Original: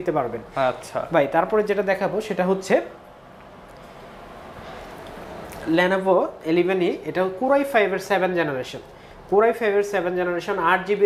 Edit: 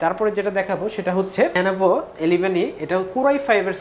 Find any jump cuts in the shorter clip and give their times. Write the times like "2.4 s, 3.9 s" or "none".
1.6 s